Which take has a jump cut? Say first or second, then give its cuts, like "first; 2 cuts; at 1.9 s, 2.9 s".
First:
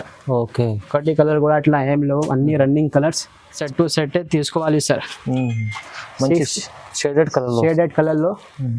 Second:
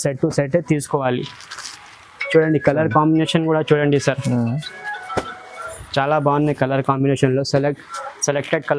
first; 1 cut; at 3.6 s